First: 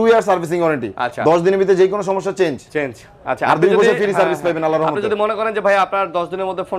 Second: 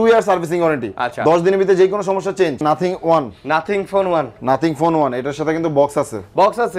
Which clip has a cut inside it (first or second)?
second